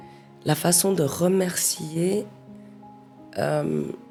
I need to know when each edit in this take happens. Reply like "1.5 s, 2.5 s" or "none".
none